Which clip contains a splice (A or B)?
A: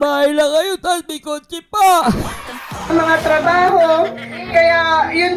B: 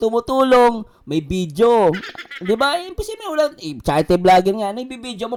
A